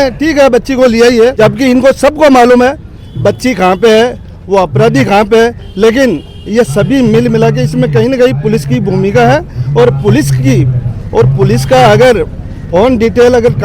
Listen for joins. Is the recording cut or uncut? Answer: cut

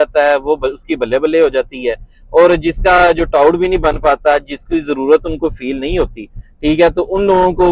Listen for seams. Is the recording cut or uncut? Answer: uncut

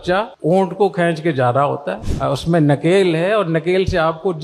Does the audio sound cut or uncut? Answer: cut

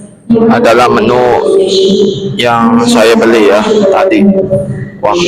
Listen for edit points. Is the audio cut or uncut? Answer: uncut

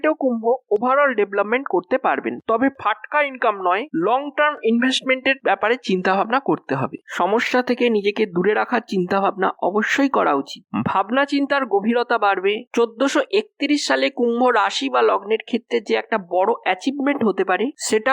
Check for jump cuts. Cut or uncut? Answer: uncut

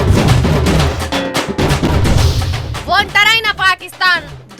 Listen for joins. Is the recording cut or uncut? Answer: cut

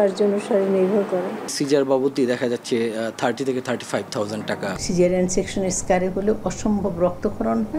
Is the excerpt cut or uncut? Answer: cut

